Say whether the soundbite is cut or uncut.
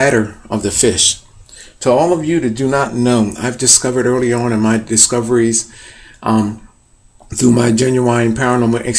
uncut